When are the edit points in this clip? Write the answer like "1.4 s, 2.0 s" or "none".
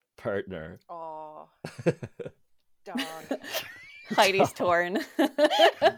1.0 s